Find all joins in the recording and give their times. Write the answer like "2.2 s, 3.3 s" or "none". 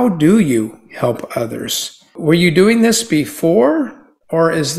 2.2 s